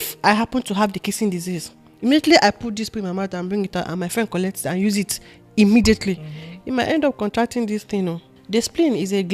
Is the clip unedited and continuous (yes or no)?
no